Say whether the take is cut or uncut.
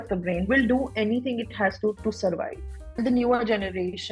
cut